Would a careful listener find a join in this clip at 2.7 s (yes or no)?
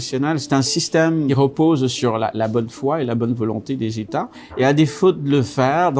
no